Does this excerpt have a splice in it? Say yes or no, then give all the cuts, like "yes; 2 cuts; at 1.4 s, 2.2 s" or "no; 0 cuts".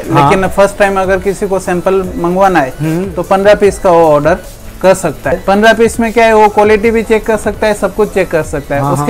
yes; 1 cut; at 5.4 s